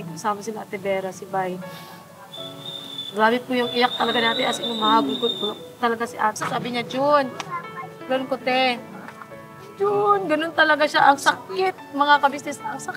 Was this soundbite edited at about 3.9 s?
no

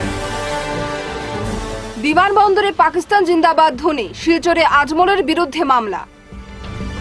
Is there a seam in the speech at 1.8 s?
yes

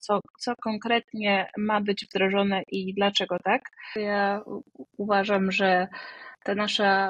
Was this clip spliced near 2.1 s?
no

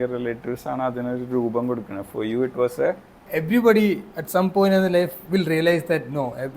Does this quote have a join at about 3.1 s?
yes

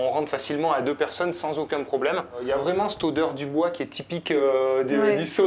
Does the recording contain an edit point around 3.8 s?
no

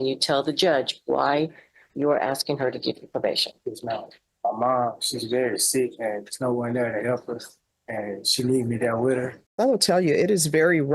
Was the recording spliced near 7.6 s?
no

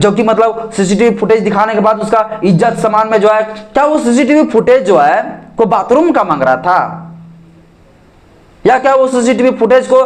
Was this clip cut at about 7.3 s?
no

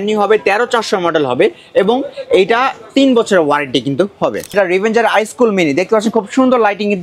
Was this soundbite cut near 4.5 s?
yes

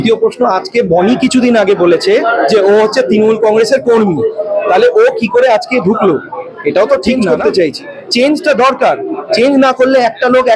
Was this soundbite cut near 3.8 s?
no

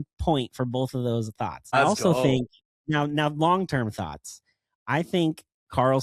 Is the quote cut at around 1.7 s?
yes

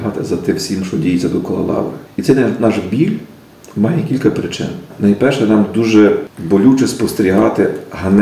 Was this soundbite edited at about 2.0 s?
yes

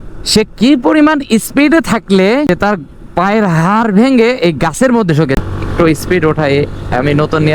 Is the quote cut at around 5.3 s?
yes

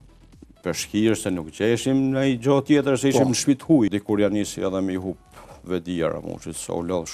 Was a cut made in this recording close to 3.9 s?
yes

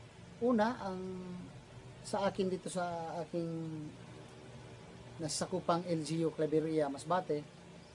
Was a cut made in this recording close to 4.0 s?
yes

